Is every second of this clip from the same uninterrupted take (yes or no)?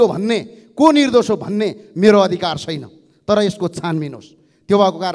yes